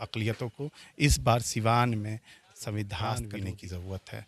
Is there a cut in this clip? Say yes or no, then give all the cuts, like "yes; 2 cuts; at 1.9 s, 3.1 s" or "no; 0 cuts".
yes; 1 cut; at 3.2 s